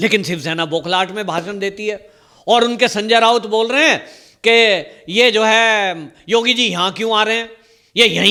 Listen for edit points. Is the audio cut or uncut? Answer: uncut